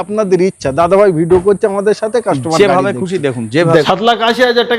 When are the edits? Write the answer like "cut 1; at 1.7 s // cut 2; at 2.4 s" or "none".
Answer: cut 1; at 3.9 s